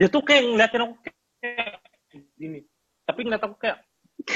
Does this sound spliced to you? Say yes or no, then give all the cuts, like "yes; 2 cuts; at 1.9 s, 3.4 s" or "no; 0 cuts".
no; 0 cuts